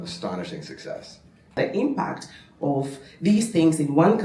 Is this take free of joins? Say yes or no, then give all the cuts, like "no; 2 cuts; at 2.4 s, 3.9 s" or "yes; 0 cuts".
no; 1 cut; at 1.6 s